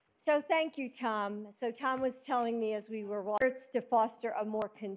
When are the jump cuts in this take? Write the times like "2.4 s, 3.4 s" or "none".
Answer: none